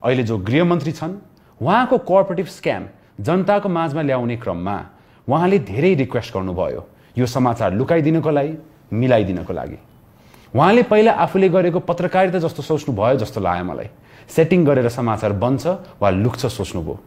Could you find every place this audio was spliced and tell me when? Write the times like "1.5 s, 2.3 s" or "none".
none